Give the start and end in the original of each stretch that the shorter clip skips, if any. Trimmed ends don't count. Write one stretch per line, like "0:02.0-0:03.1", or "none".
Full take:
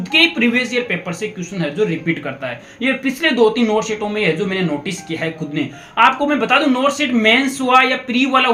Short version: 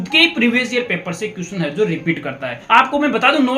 0:02.6-0:05.8